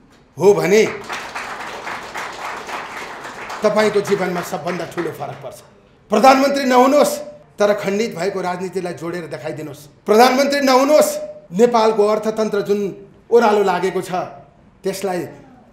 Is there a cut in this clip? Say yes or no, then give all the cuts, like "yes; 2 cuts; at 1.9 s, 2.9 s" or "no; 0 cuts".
no; 0 cuts